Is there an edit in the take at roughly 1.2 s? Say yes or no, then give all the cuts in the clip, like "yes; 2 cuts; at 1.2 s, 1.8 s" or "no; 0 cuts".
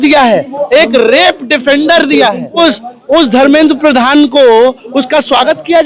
no; 1 cut; at 2.6 s